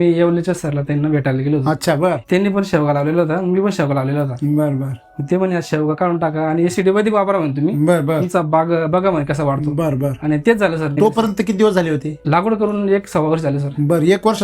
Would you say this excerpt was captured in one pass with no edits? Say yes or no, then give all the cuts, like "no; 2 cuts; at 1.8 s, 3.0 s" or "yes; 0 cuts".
no; 3 cuts; at 2.2 s, 10.9 s, 12.1 s